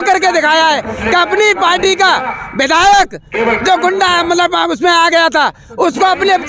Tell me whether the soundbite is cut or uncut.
uncut